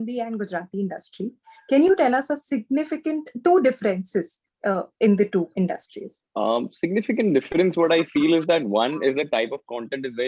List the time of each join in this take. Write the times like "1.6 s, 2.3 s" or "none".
none